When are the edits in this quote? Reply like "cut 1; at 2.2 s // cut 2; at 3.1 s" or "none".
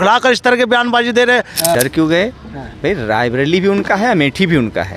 cut 1; at 1.7 s